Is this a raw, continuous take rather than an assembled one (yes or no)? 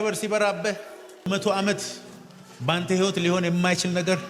no